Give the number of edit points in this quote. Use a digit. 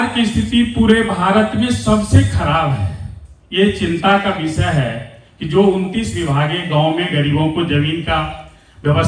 0